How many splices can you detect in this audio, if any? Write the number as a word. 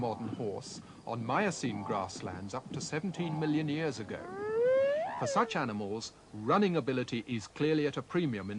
one